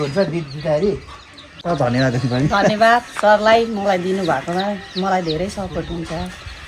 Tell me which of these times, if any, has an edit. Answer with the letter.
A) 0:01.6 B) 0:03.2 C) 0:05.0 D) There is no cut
A